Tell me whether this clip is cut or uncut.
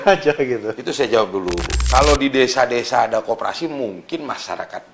cut